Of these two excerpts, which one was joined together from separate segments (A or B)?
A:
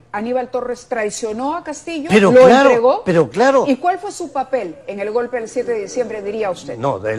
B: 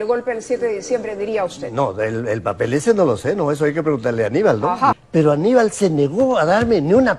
B